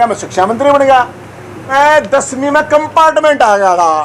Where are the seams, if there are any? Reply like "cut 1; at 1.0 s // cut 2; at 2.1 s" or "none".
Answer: cut 1; at 1.6 s